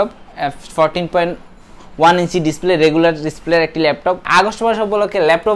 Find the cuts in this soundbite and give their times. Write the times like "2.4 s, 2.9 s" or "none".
4.3 s